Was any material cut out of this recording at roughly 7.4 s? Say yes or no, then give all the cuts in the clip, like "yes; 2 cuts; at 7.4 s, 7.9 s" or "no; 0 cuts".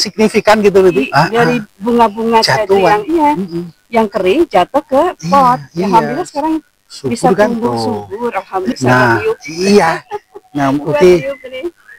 no; 2 cuts; at 1.0 s, 8.7 s